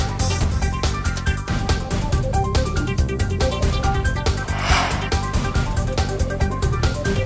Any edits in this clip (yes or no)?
no